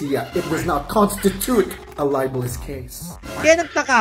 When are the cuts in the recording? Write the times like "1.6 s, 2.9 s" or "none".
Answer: 3.1 s

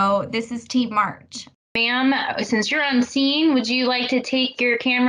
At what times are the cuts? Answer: 1.8 s

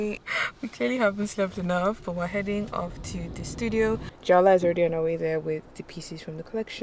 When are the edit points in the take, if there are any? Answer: 4.1 s

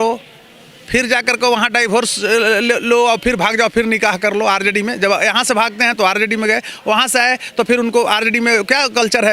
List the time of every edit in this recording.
none

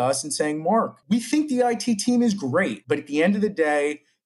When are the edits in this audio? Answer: 1.0 s, 2.8 s

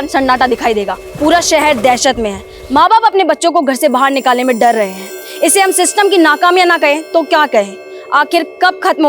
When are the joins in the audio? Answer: 1.0 s

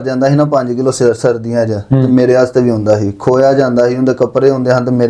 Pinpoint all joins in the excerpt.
none

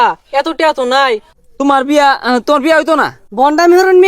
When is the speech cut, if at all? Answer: 1.3 s, 3.2 s

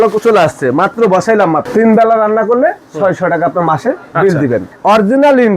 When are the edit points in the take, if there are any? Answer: 1.6 s, 4.7 s

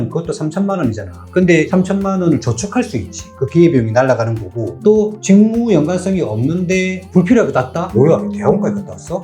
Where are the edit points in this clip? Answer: 1.7 s, 7.8 s

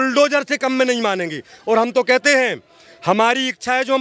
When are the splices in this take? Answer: none

